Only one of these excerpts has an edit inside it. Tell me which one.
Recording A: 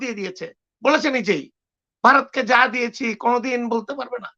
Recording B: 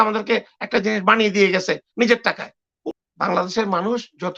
B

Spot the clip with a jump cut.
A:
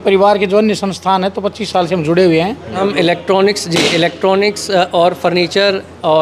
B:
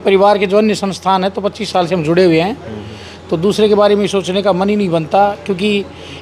A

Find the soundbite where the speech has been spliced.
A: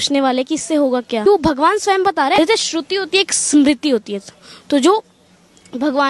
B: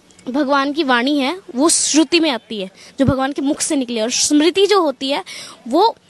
A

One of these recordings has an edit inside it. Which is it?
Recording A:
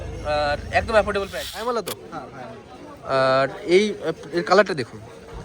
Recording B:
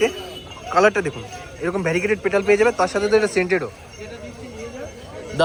A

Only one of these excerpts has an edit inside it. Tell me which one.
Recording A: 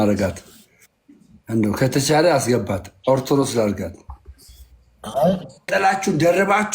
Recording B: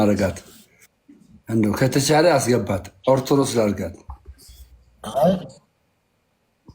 A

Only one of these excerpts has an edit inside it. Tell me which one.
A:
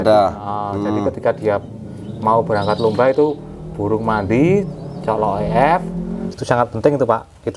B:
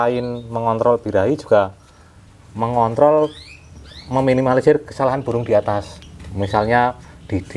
A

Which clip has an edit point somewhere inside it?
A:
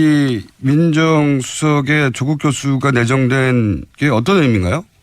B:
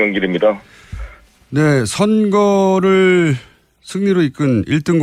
A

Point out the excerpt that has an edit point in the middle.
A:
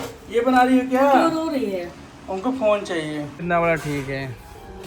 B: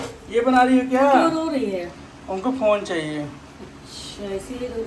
A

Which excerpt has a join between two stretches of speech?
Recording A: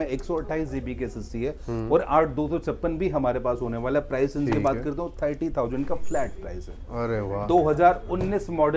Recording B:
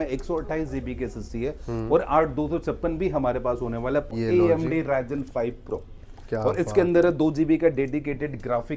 B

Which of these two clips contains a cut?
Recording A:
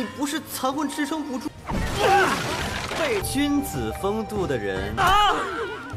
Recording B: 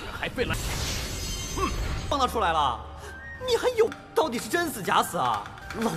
A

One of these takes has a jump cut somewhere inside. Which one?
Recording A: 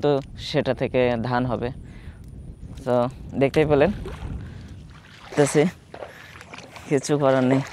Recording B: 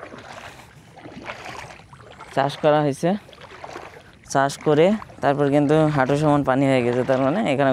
A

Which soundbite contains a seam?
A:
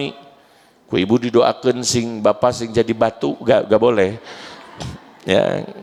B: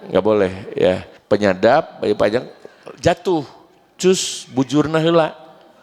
B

